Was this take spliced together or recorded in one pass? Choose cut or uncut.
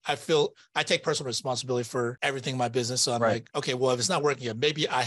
cut